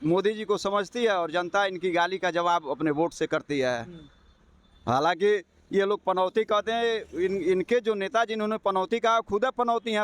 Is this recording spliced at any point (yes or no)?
no